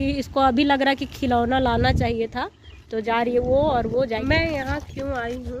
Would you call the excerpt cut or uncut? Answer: cut